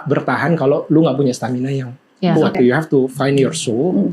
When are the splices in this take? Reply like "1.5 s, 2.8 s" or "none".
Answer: 2.6 s

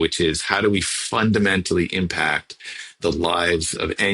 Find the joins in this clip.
none

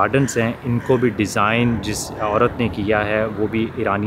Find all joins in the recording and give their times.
none

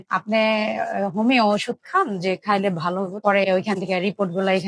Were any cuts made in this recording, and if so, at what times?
3.2 s

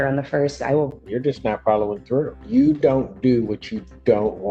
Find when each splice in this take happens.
1.1 s, 2.4 s

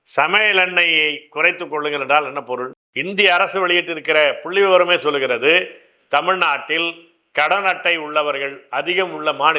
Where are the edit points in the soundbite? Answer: 2.8 s

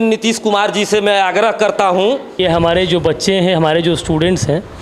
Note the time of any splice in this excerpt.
2.4 s

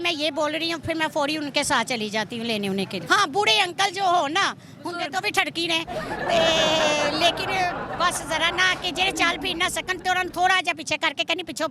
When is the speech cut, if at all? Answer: 3.0 s

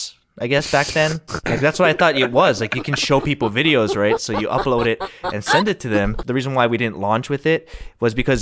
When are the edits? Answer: 6.2 s

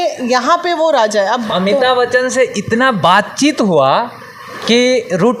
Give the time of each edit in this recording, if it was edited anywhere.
1.4 s

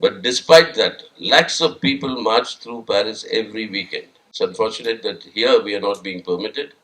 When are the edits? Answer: 4.3 s

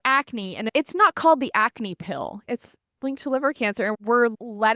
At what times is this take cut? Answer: 2.5 s, 3.9 s

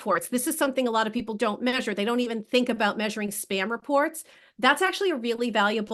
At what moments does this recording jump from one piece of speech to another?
none

